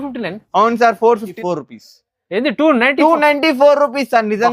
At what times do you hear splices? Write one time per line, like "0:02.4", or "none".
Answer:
0:01.3